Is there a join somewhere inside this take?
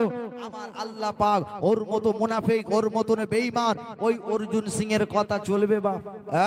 no; 0 cuts

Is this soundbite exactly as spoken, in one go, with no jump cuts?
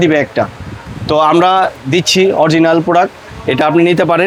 yes; 0 cuts

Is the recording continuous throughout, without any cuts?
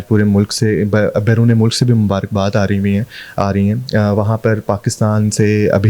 yes; 0 cuts

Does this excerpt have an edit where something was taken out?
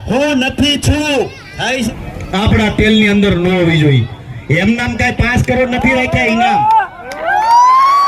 yes; 1 cut; at 1.9 s

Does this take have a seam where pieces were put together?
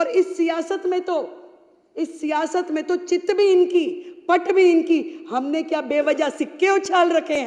no; 0 cuts

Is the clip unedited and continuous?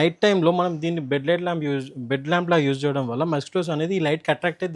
yes; 0 cuts

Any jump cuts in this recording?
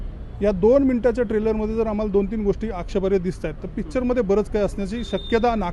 no; 0 cuts

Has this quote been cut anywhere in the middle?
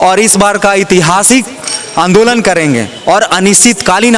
no; 0 cuts

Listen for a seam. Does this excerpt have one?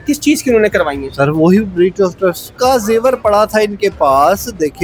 yes; 1 cut; at 2.5 s

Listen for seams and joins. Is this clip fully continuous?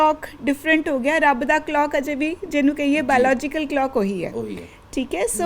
yes; 0 cuts

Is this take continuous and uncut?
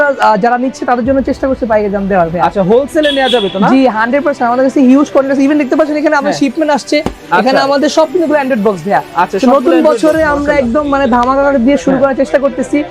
yes; 0 cuts

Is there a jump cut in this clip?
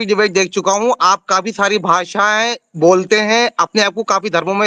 no; 0 cuts

